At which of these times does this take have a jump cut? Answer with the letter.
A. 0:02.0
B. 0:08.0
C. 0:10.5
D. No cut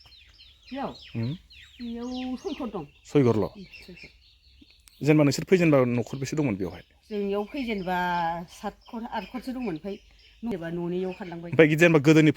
C